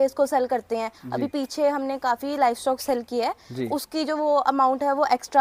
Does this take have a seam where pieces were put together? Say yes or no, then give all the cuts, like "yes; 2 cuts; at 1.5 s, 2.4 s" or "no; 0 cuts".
no; 0 cuts